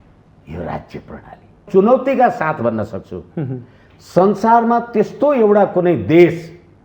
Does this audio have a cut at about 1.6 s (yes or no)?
yes